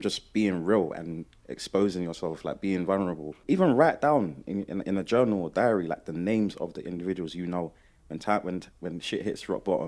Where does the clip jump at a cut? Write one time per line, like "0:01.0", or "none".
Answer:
0:03.3